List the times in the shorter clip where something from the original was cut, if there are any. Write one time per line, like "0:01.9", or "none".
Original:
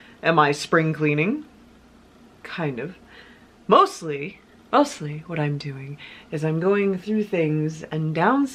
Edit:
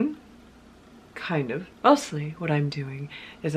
0:01.6